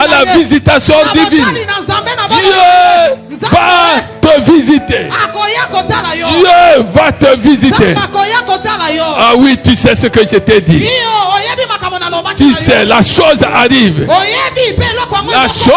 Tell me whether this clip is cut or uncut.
uncut